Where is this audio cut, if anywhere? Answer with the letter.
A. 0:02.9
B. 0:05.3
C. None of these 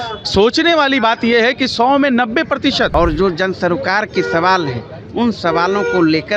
A